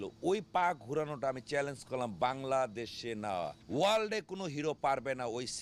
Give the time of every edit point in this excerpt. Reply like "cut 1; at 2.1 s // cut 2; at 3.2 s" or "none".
cut 1; at 3.6 s